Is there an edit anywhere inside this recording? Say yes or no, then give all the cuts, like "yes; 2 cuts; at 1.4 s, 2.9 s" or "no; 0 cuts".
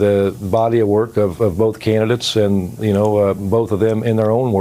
no; 0 cuts